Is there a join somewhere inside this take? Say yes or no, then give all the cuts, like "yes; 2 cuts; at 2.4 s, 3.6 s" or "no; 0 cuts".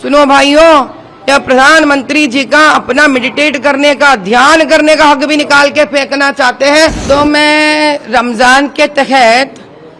yes; 1 cut; at 7.0 s